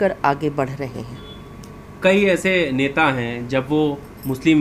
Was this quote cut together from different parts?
no; 0 cuts

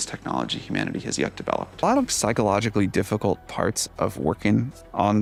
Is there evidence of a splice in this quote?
no; 0 cuts

